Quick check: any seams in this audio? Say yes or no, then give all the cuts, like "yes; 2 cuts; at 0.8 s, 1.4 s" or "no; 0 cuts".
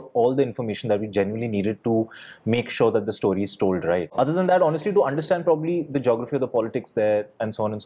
no; 0 cuts